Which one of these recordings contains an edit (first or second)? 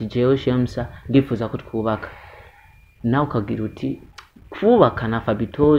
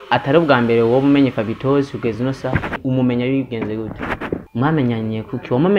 second